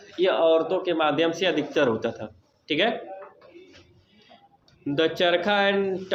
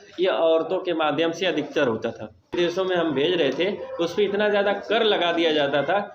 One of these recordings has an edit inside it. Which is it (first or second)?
second